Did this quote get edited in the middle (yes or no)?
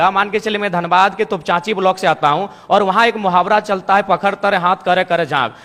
no